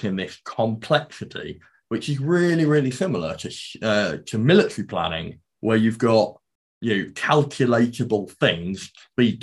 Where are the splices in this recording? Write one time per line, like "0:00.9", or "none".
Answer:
none